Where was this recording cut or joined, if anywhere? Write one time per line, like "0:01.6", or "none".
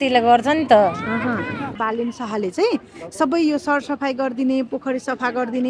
0:01.8

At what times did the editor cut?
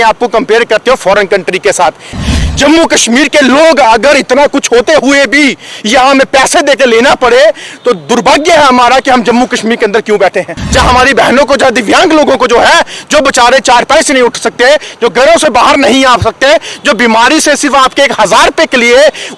0:02.2
0:10.6

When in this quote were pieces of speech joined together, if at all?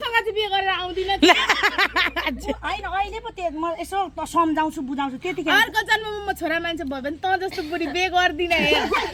none

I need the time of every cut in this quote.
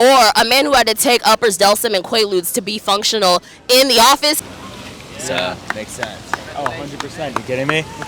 0:04.4

